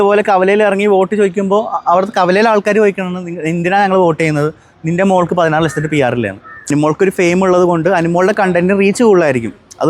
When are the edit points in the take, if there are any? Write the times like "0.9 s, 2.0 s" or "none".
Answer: 6.7 s